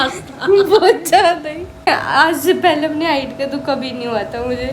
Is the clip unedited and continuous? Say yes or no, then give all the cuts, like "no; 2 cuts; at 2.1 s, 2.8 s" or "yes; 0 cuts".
no; 1 cut; at 1.8 s